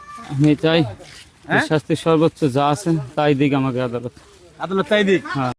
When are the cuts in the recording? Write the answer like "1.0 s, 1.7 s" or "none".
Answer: none